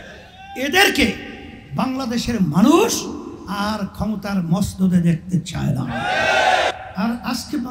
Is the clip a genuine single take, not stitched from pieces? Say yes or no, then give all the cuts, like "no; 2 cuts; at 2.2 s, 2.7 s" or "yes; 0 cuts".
no; 1 cut; at 6.8 s